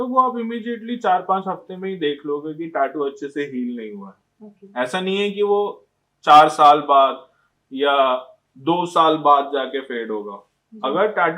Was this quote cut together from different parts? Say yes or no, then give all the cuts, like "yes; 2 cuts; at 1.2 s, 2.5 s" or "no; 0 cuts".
no; 0 cuts